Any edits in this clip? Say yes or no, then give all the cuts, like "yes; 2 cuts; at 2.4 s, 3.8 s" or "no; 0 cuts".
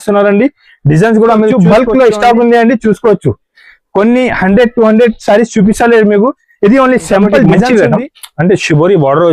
yes; 2 cuts; at 1.5 s, 7.7 s